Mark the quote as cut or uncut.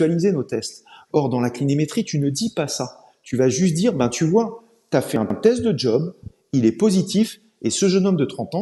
uncut